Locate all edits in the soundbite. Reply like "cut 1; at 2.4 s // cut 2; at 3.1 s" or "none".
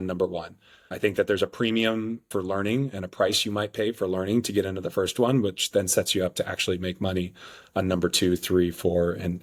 none